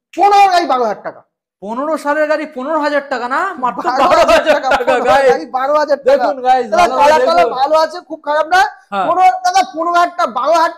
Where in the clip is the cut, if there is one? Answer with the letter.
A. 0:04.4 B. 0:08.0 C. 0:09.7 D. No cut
D